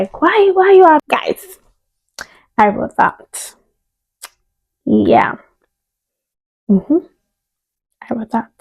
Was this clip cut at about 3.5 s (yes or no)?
no